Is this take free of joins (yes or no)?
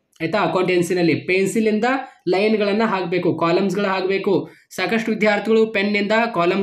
yes